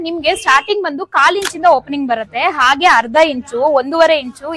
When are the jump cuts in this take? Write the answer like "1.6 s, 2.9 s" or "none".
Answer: none